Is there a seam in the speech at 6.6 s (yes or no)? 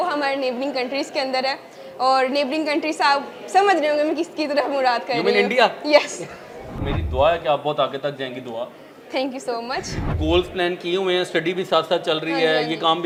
no